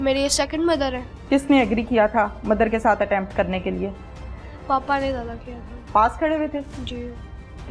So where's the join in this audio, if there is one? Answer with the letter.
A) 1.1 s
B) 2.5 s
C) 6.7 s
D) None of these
A